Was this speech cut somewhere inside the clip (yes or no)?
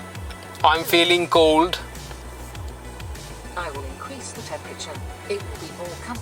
no